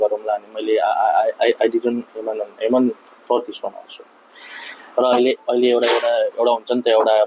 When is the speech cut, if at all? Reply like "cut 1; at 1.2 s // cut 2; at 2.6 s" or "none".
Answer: none